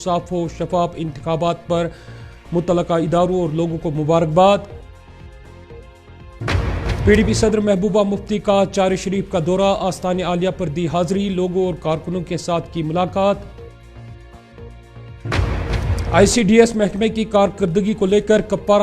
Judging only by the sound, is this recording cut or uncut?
uncut